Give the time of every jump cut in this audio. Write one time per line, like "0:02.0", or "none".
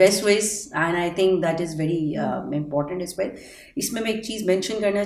none